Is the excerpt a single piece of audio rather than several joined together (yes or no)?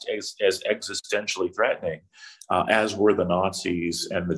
yes